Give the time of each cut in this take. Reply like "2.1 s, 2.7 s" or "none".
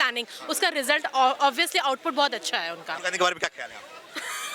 3.0 s